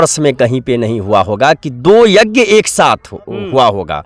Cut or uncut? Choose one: uncut